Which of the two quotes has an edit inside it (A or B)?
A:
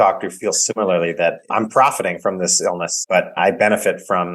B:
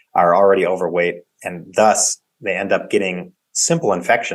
A